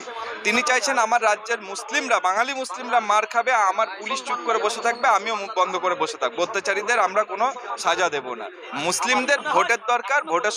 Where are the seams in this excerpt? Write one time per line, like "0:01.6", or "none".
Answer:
0:08.6